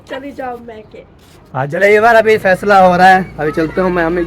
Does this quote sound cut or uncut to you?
cut